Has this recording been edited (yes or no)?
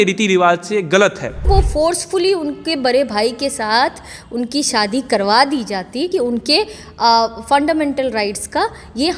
yes